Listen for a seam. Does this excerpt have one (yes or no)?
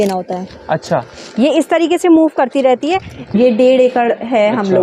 yes